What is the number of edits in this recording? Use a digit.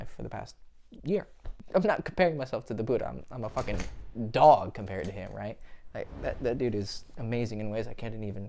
1